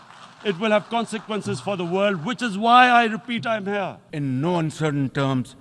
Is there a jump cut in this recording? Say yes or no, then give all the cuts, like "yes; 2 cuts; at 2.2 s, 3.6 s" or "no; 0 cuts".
yes; 1 cut; at 4.0 s